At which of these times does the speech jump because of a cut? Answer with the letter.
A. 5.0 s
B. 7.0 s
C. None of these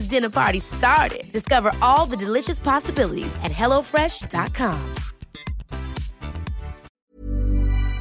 B